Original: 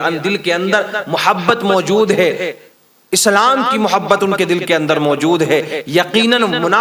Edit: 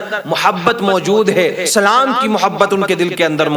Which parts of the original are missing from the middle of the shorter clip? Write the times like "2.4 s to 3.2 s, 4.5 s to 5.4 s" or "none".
2.5 s to 3.2 s